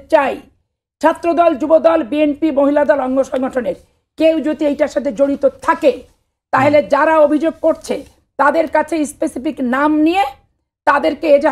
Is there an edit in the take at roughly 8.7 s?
no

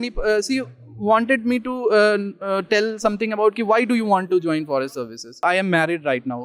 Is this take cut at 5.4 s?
yes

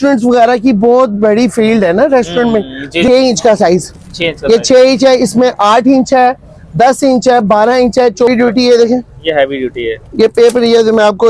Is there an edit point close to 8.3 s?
yes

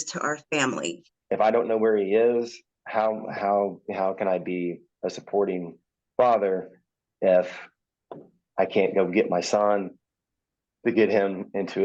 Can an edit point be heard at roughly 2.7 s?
no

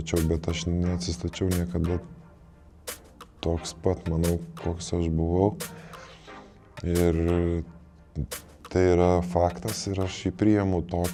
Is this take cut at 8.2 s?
no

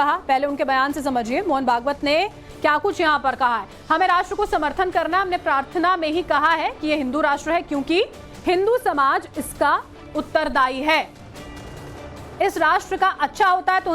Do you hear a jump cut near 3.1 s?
yes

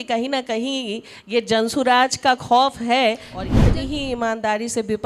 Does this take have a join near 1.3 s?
no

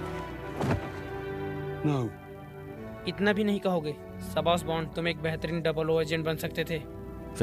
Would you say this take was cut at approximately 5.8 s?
no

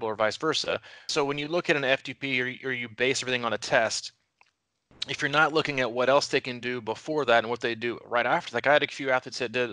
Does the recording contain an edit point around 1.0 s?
yes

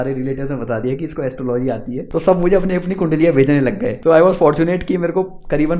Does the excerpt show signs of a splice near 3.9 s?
yes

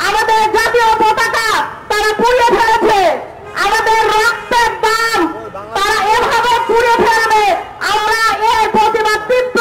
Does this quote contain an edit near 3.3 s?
no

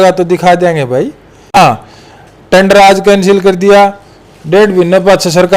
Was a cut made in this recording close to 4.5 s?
no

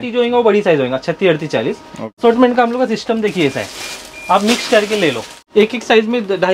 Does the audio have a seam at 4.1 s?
no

